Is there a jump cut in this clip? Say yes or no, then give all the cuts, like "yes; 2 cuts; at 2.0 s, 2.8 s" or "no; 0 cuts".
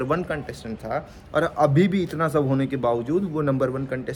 no; 0 cuts